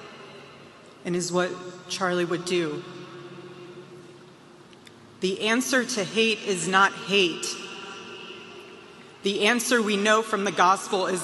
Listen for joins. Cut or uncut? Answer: uncut